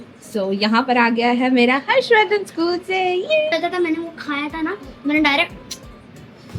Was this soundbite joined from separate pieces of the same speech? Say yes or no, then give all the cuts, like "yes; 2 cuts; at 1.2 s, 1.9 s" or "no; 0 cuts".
yes; 1 cut; at 3.5 s